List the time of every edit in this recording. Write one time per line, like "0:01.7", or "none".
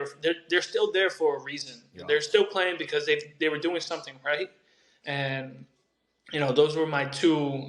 none